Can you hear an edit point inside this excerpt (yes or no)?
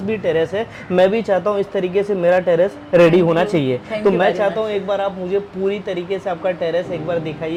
no